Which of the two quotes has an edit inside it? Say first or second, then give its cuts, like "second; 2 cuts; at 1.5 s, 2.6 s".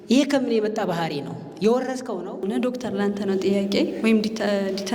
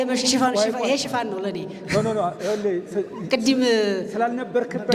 first; 1 cut; at 2.4 s